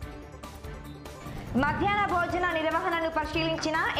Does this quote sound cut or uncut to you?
uncut